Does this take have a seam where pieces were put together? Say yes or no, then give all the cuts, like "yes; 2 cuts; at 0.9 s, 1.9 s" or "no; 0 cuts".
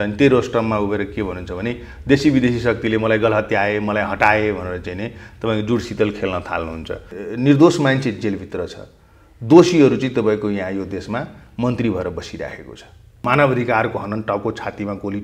yes; 2 cuts; at 7.1 s, 13.2 s